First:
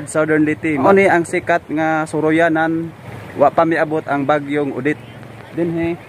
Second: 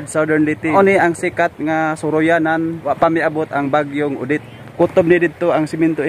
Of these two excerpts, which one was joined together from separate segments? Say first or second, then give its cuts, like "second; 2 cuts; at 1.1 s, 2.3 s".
second; 3 cuts; at 0.7 s, 2.8 s, 4.6 s